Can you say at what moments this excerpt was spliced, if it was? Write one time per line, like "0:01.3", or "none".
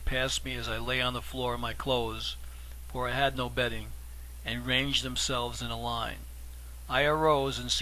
0:05.5

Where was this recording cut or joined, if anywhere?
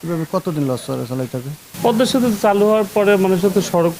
0:01.6

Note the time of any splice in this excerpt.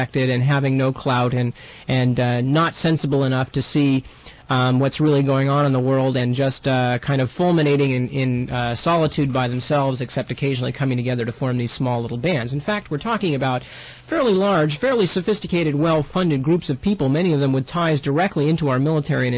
0:12.9

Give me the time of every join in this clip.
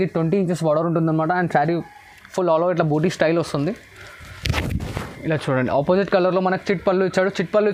none

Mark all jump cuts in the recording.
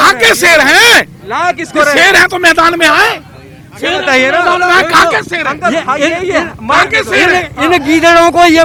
none

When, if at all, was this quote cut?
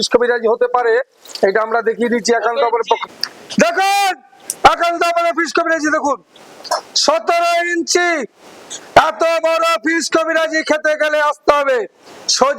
0:03.0

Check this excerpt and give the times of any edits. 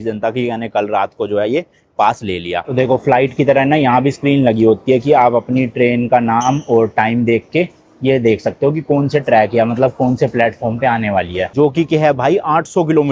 0:02.7
0:11.5

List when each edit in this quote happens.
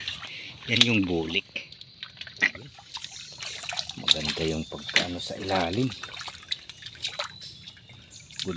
0:01.5
0:03.0

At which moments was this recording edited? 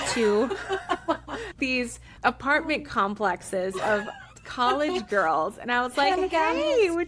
0:01.7

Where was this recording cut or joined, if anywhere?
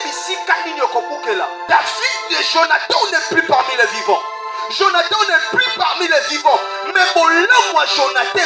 0:01.6

